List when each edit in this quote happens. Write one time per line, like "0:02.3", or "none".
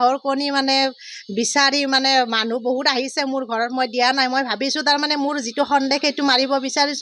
none